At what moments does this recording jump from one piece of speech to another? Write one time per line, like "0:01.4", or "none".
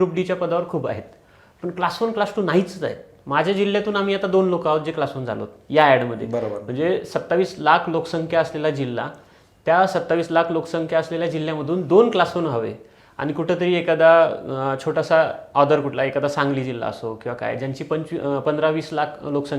none

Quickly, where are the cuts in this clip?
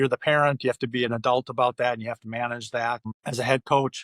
0:03.1

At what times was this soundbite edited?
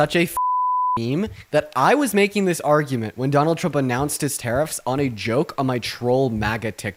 none

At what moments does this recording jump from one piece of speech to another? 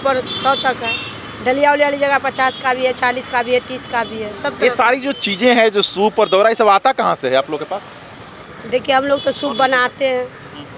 none

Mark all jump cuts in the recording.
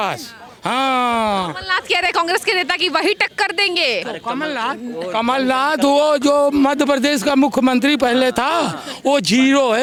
none

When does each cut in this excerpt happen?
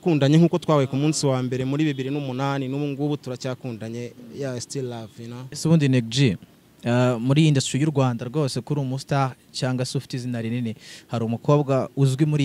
0:05.5

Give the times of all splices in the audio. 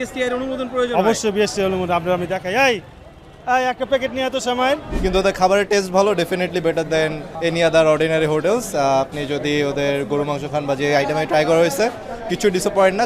0:04.9
0:07.3

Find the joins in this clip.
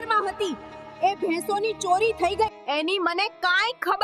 0:02.6

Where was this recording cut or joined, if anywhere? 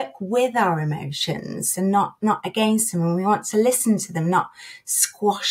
none

